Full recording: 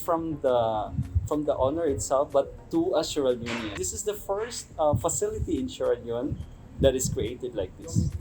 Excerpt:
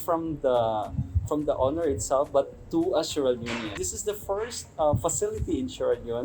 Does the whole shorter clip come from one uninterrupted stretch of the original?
yes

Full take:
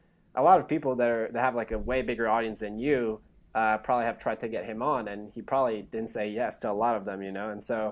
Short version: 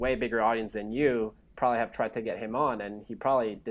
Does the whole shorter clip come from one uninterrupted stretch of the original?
no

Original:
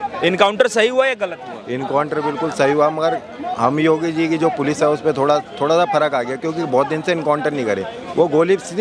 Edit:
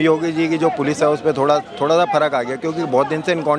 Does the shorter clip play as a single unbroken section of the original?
yes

